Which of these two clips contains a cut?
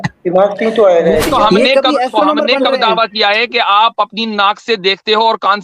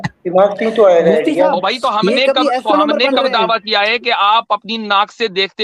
first; 1 cut; at 1.3 s

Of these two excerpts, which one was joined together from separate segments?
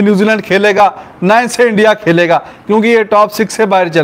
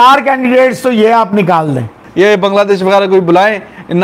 second; 1 cut; at 2.0 s

